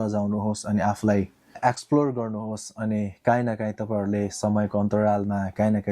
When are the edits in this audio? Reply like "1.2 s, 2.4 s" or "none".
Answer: 1.6 s